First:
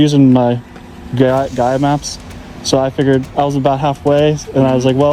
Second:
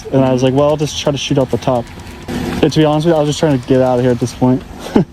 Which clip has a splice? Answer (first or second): second